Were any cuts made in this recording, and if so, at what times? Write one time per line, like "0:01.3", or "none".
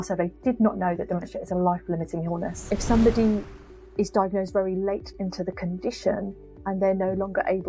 0:02.6